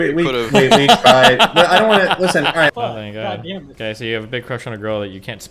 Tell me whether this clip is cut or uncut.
cut